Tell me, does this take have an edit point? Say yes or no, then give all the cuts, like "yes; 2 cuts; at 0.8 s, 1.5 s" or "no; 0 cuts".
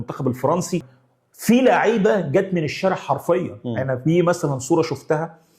yes; 1 cut; at 1.0 s